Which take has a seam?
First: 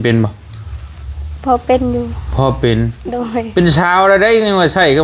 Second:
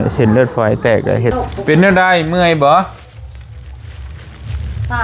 second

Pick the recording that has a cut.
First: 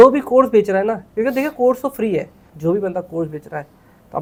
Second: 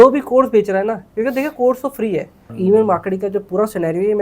second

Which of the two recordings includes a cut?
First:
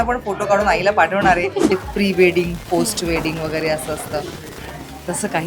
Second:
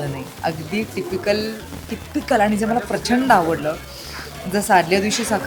first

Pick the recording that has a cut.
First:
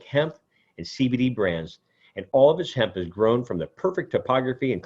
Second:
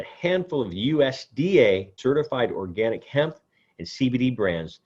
second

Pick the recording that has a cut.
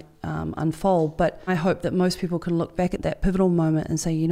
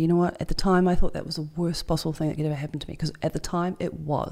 first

